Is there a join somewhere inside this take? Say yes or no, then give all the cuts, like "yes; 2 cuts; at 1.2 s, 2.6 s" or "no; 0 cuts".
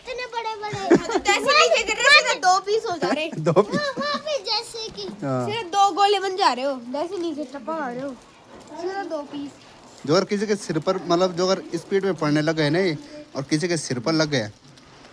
no; 0 cuts